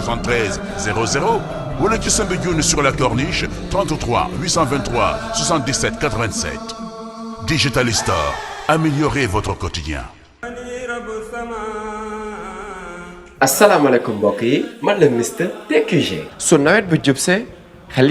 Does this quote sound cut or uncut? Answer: cut